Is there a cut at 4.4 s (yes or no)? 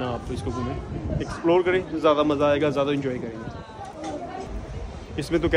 yes